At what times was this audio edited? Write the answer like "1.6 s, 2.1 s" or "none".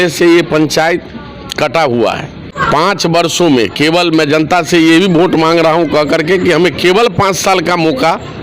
2.5 s